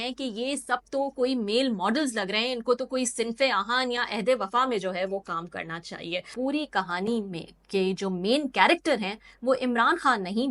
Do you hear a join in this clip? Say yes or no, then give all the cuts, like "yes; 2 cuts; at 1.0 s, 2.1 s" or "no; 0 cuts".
yes; 1 cut; at 6.3 s